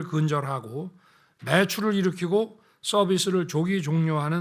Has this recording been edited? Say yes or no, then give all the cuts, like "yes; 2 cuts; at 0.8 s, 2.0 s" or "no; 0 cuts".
no; 0 cuts